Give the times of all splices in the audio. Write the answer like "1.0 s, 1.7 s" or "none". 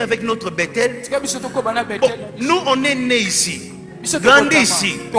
none